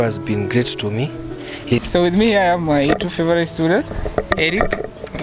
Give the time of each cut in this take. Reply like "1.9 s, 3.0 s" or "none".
1.8 s